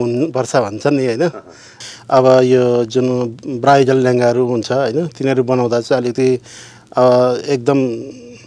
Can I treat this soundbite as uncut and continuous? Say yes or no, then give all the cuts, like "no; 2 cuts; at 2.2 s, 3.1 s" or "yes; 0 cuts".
no; 1 cut; at 1.7 s